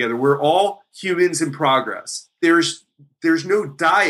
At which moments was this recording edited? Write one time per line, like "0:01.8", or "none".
0:02.2